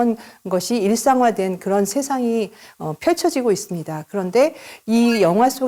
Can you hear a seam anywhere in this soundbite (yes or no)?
no